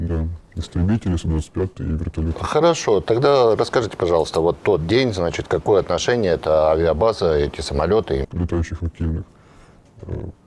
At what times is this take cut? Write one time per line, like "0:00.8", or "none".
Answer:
none